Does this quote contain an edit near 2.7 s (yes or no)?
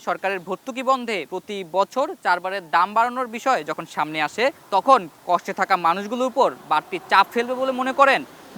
no